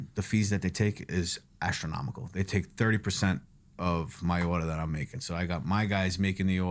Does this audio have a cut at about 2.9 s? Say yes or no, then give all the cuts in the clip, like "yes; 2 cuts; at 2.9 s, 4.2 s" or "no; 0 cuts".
no; 0 cuts